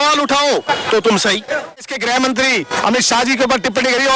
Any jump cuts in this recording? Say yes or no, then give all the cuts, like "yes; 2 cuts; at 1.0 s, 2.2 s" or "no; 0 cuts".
yes; 1 cut; at 1.9 s